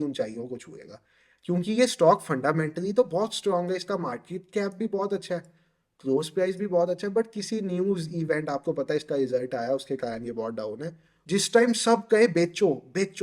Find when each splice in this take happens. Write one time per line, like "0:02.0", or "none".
0:11.1

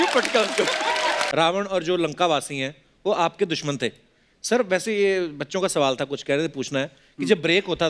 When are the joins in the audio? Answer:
0:01.3

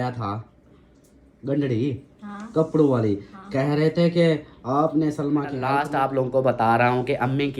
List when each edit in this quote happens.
0:05.8

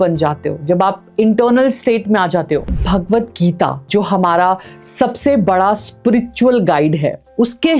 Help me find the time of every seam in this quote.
0:02.7
0:03.8

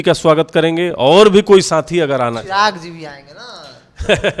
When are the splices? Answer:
none

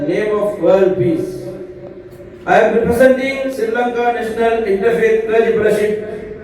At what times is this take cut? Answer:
none

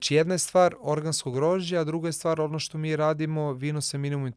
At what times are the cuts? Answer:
none

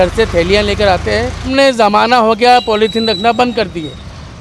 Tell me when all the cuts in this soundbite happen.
0:01.5

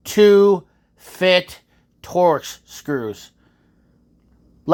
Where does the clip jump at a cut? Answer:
none

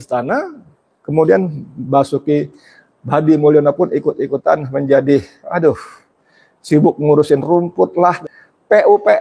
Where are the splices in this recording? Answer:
0:08.2

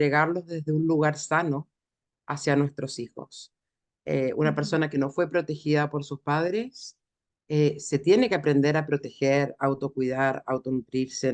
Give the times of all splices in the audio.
none

